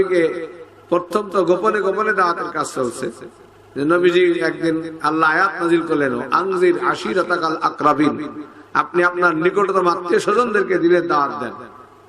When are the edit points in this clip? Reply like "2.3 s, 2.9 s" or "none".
none